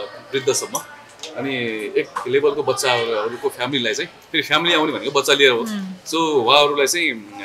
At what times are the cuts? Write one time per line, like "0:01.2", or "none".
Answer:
none

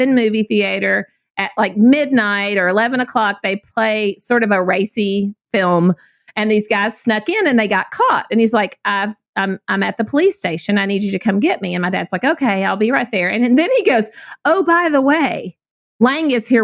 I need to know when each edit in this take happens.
0:05.4

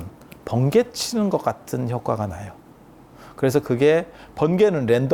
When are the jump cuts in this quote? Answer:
none

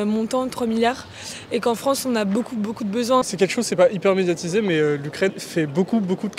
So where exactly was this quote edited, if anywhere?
0:03.2
0:05.4

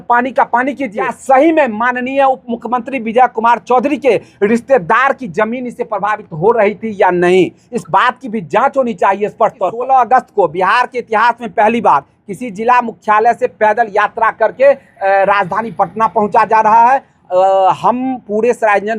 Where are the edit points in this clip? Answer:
0:01.1
0:09.7

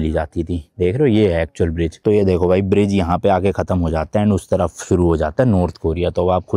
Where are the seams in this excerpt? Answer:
0:02.0

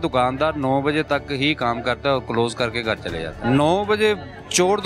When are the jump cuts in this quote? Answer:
0:03.3

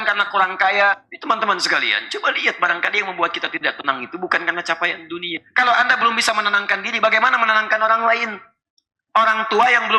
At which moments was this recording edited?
0:01.0
0:05.3

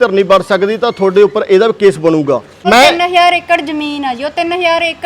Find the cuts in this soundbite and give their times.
0:02.5

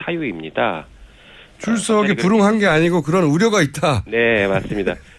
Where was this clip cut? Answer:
0:04.0

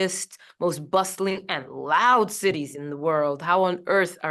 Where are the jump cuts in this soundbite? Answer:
none

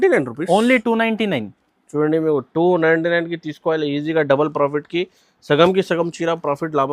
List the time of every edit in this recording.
none

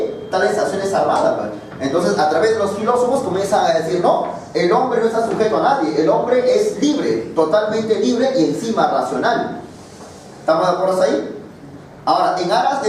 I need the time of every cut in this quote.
none

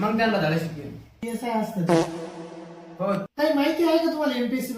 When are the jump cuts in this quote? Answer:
0:03.3

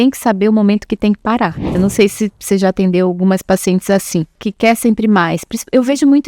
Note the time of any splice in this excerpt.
0:01.7
0:04.4

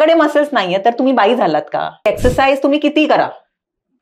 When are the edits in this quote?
0:02.1

